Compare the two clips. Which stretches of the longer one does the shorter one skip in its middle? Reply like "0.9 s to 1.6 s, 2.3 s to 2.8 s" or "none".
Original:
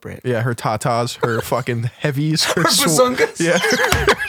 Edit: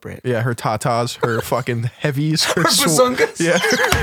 none

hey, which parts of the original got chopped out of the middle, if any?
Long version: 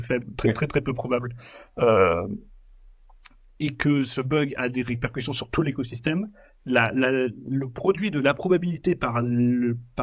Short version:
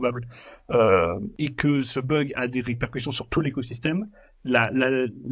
2.4 s to 3.5 s

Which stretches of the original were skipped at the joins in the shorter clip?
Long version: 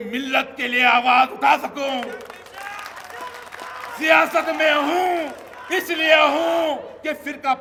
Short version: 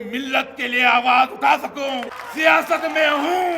2.2 s to 3.8 s

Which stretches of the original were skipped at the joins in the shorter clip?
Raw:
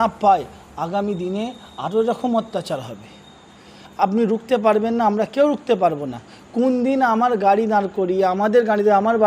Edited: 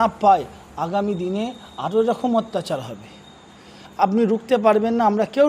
none

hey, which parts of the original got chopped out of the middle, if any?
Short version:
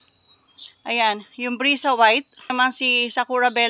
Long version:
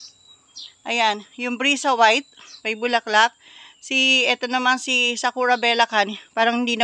2.5 s to 4.6 s

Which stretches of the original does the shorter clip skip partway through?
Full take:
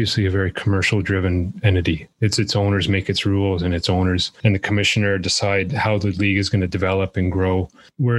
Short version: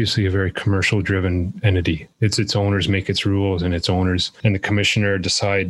none

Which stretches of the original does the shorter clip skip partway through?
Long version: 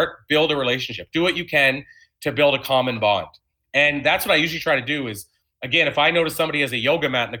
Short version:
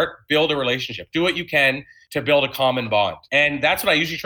1.9 s to 2.0 s, 3.3 s to 3.6 s

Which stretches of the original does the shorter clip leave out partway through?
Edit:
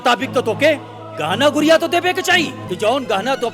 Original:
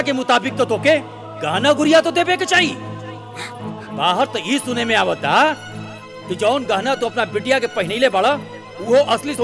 2.8 s to 6.2 s

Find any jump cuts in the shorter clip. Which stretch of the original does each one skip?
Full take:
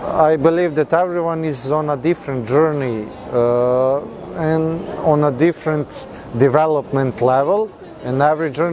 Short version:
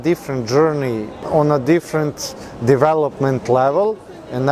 3.2 s to 4.9 s

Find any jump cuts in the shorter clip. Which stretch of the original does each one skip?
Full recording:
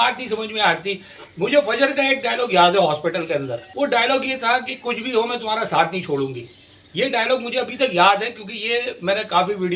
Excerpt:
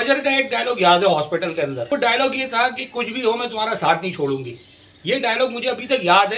3.5 s to 3.7 s

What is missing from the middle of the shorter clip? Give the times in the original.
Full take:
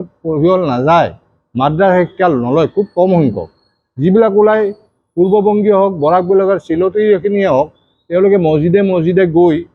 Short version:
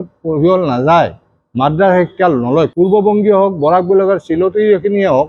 2.7 s to 5.1 s

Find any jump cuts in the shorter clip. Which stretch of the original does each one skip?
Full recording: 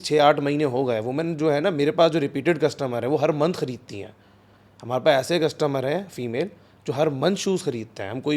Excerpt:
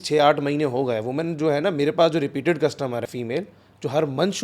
3.0 s to 6.1 s

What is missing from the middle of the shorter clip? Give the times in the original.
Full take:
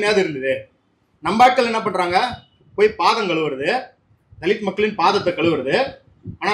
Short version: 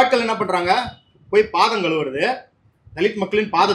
none

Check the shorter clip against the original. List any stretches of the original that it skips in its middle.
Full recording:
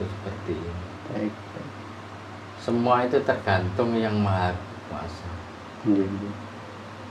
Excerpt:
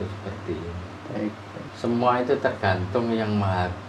1.7 s to 2.5 s

